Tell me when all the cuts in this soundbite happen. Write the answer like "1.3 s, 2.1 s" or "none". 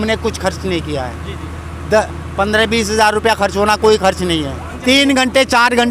4.7 s